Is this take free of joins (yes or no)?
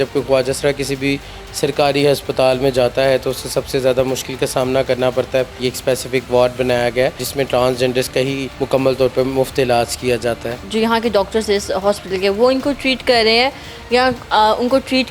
no